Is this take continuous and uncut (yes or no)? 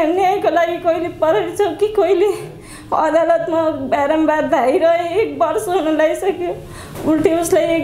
yes